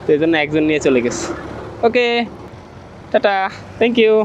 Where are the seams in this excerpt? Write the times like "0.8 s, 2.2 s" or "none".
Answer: 2.5 s